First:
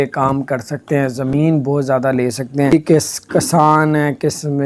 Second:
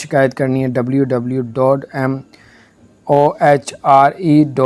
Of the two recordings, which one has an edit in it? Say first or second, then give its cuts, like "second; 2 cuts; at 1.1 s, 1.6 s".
first; 1 cut; at 2.7 s